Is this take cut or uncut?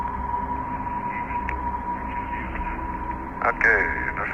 cut